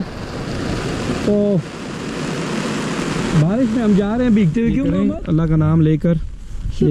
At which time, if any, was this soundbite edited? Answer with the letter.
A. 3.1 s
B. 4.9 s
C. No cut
B